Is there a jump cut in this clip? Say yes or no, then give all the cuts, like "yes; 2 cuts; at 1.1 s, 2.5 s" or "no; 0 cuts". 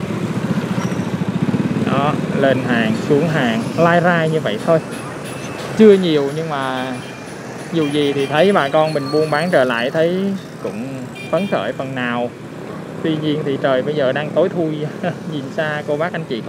no; 0 cuts